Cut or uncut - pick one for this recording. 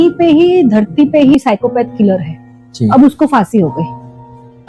cut